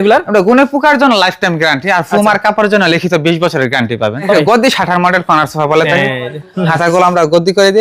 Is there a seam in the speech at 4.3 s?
yes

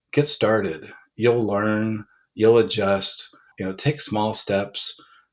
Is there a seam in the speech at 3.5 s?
yes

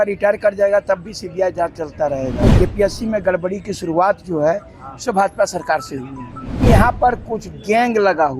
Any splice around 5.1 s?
no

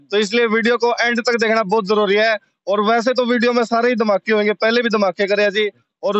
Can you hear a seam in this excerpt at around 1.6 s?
no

